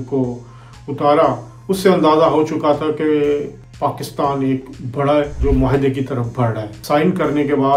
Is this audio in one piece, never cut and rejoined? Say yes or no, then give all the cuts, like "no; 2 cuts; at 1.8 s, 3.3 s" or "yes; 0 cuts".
no; 3 cuts; at 3.6 s, 5.3 s, 6.7 s